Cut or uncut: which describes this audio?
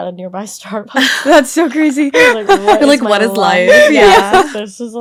uncut